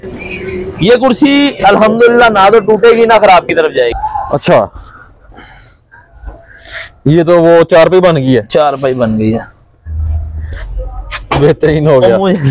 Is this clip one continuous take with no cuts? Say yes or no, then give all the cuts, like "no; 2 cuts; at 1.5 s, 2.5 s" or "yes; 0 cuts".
no; 1 cut; at 4.0 s